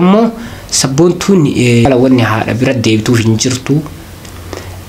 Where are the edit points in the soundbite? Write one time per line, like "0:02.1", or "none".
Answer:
0:01.7